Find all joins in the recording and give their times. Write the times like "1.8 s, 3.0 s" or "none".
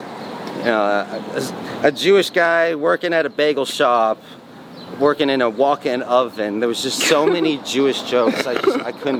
none